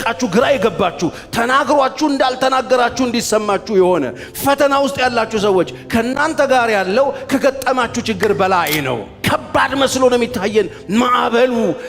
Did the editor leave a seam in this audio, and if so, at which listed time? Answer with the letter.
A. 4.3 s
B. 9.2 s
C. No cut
B